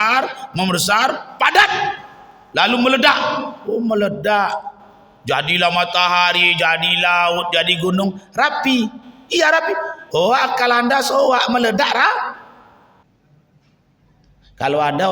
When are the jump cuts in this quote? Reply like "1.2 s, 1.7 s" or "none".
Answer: 13.0 s